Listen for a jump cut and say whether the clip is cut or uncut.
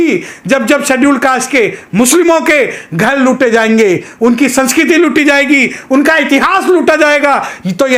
uncut